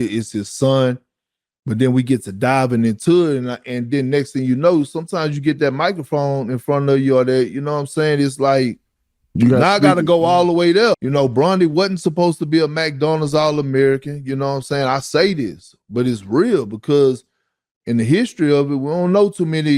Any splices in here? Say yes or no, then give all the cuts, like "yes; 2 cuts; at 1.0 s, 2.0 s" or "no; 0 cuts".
yes; 1 cut; at 11.0 s